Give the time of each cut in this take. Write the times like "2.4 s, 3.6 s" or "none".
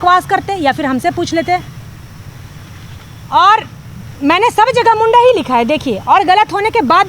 none